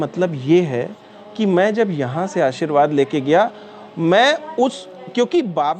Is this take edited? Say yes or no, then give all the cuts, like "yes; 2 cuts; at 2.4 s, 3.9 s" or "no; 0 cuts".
no; 0 cuts